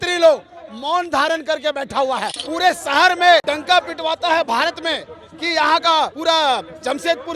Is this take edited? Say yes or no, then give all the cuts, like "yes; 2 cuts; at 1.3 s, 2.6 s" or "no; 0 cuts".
yes; 3 cuts; at 2.4 s, 3.4 s, 6.2 s